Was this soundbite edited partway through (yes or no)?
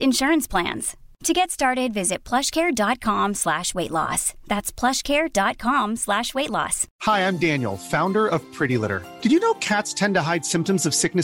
yes